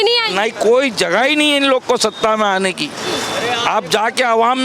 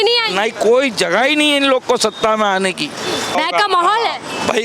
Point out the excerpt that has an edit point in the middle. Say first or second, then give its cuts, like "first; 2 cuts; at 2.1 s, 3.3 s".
second; 1 cut; at 3.3 s